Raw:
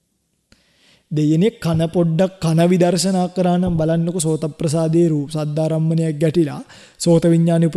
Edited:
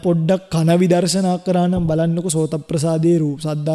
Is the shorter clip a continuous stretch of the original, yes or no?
yes